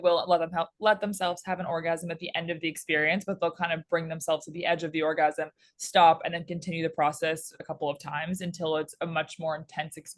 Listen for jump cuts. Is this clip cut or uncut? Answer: uncut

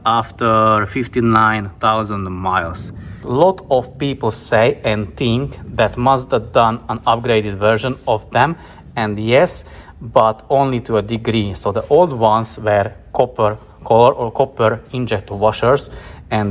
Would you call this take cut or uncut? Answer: uncut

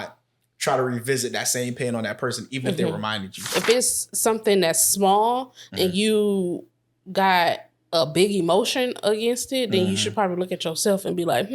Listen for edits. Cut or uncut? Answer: cut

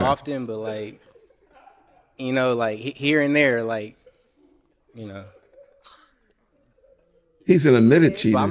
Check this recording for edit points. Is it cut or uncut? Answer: uncut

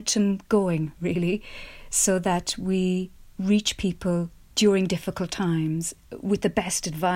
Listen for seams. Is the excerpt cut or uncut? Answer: uncut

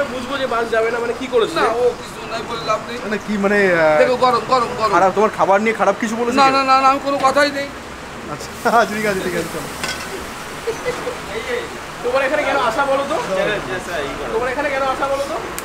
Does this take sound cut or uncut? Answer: uncut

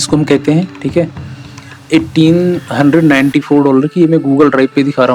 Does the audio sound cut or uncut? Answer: uncut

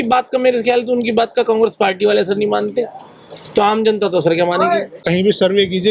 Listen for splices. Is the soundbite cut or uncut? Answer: cut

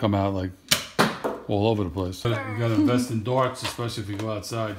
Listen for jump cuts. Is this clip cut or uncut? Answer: cut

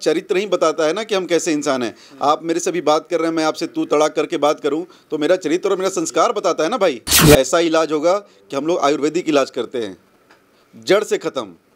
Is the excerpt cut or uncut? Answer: cut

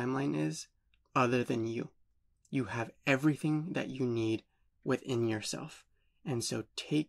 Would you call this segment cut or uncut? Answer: uncut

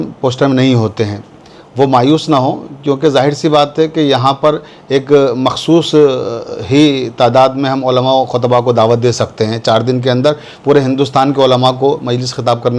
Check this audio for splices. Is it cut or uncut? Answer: uncut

